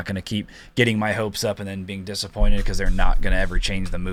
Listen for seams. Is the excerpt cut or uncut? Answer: uncut